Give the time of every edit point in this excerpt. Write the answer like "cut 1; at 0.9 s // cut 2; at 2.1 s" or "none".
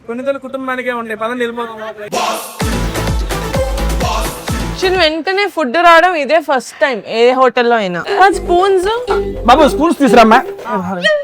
cut 1; at 4.7 s // cut 2; at 8.0 s